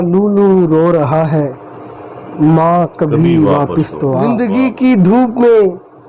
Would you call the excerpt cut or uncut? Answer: cut